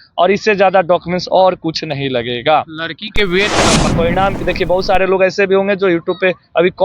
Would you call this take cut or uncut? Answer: cut